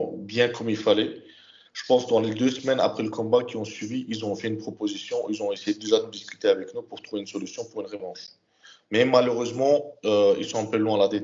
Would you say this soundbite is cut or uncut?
uncut